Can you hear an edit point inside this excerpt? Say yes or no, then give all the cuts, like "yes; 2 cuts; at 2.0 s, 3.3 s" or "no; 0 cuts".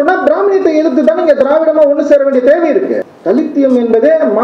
yes; 1 cut; at 3.1 s